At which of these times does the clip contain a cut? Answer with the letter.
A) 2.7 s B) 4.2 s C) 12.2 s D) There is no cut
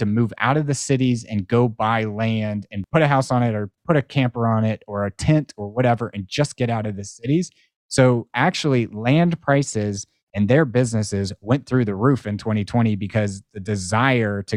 A